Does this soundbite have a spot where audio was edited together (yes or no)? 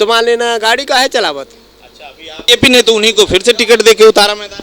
yes